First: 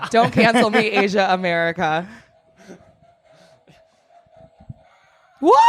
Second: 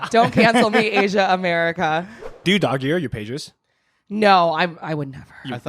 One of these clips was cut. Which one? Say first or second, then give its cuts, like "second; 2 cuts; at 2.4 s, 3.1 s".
second; 1 cut; at 2.4 s